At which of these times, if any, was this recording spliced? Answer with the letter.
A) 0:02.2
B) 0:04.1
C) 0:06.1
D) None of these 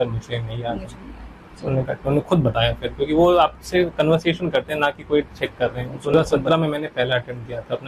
C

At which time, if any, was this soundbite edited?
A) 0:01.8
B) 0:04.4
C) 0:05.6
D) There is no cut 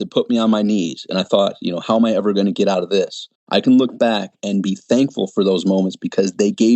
B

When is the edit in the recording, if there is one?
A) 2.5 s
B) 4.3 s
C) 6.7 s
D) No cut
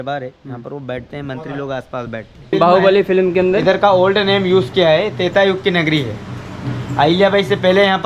A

